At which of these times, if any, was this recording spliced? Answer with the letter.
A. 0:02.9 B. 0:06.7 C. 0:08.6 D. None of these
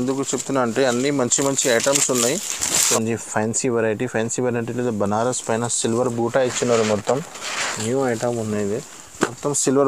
A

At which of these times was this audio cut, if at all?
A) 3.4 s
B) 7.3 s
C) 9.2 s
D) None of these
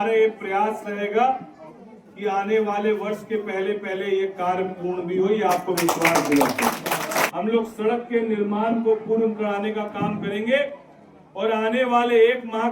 B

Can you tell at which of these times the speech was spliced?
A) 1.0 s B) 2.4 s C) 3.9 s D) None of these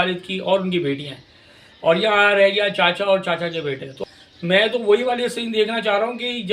C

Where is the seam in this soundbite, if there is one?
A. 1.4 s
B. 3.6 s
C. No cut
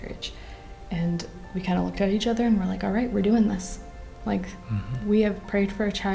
A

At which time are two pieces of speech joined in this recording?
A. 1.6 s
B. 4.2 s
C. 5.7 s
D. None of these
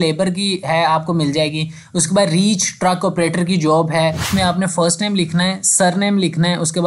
B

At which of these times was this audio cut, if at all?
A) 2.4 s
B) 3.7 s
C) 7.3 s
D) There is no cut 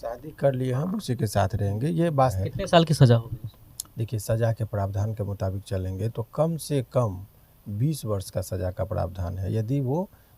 A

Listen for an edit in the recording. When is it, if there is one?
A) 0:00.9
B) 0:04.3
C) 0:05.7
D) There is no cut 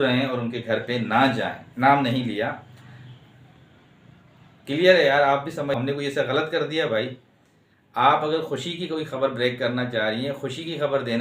C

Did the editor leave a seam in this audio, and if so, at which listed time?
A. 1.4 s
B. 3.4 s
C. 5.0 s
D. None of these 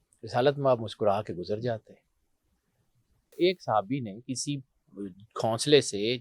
B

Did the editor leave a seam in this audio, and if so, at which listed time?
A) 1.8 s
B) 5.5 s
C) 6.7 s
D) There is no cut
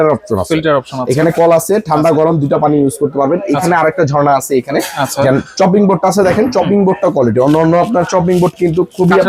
D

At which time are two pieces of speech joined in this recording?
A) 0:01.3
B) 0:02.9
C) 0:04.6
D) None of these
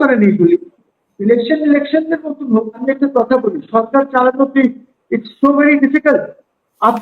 B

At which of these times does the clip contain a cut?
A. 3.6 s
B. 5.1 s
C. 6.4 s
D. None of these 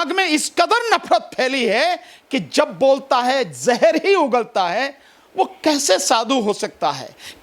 D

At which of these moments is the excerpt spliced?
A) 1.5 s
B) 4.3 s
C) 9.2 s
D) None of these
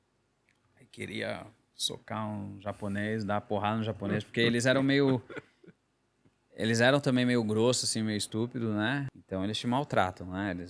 C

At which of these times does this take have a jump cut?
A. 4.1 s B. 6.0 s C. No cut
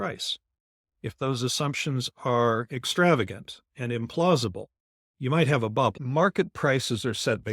B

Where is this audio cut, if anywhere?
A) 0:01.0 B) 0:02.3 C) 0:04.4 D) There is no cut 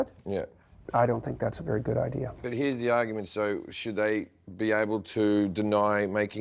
B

